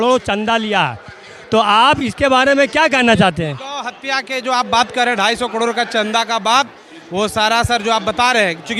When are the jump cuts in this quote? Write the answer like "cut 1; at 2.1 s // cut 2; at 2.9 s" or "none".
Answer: none

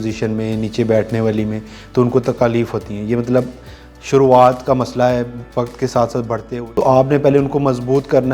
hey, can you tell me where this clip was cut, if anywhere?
cut 1; at 6.4 s

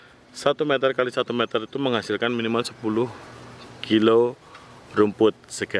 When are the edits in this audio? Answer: none

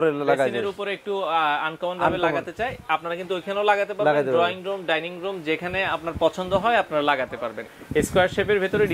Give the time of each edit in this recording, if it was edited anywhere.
cut 1; at 7.6 s

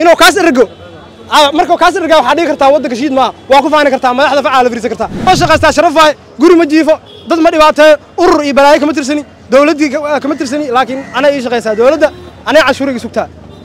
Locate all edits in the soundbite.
cut 1; at 5.3 s

